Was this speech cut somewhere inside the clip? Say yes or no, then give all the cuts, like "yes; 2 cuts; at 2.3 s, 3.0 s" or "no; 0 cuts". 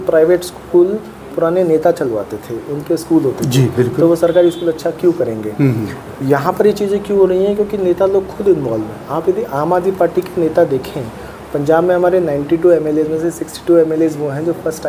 no; 0 cuts